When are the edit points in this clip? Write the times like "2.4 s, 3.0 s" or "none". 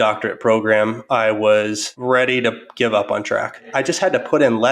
1.9 s, 3.7 s